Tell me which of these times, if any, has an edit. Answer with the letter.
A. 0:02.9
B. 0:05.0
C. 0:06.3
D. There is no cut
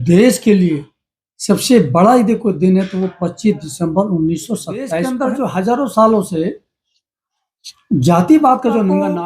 B